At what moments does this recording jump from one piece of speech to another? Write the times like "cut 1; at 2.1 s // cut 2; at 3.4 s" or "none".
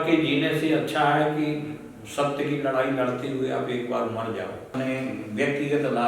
cut 1; at 4.7 s